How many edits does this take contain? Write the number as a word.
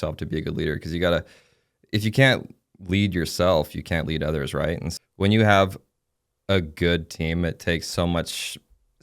one